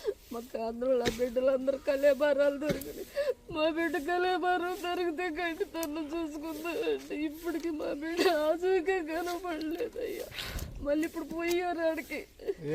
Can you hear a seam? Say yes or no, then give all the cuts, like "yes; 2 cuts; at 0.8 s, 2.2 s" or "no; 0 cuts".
yes; 1 cut; at 4.5 s